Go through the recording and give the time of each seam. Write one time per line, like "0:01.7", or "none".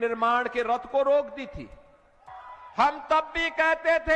0:02.4